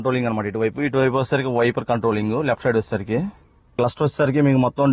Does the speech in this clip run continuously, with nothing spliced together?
yes; 0 cuts

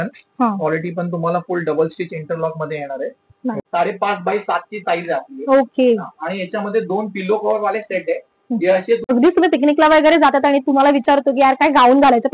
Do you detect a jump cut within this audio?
yes; 2 cuts; at 3.6 s, 9.1 s

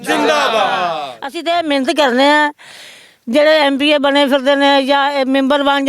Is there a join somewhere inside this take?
yes; 1 cut; at 1.1 s

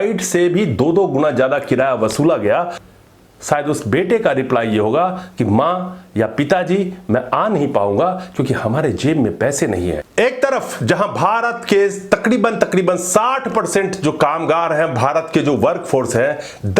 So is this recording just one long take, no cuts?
no; 2 cuts; at 2.8 s, 10.0 s

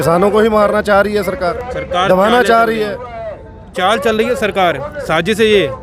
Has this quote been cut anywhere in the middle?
no; 0 cuts

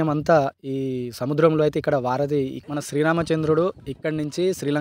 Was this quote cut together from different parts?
yes; 1 cut; at 2.6 s

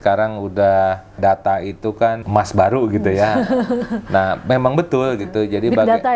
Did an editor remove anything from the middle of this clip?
yes; 2 cuts; at 1.2 s, 2.2 s

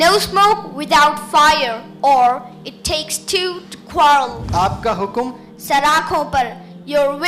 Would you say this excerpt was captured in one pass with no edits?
no; 1 cut; at 4.4 s

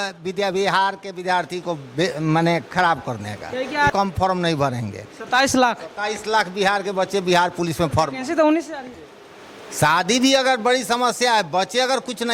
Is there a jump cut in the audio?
yes; 2 cuts; at 3.9 s, 8.9 s

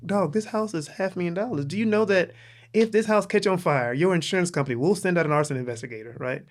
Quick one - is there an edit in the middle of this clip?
no; 0 cuts

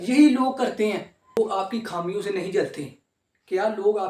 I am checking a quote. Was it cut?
yes; 1 cut; at 1.4 s

